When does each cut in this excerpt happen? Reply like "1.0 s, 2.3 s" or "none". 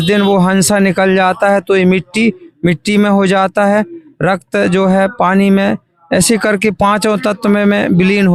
none